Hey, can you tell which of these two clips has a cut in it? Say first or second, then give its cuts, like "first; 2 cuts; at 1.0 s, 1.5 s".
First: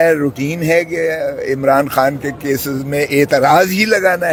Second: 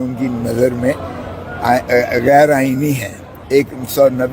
second; 1 cut; at 3.4 s